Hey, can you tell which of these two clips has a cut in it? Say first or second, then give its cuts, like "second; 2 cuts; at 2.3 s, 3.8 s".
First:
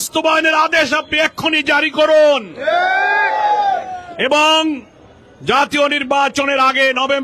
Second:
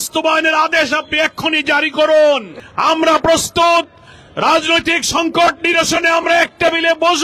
second; 1 cut; at 2.5 s